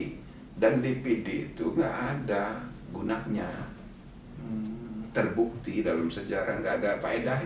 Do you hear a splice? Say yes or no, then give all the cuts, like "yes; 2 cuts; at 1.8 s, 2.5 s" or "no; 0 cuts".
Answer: no; 0 cuts